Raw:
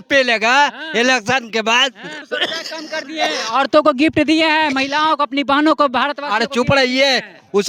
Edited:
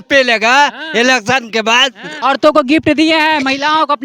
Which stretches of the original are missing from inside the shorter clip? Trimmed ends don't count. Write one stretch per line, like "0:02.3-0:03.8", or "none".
0:02.1-0:03.4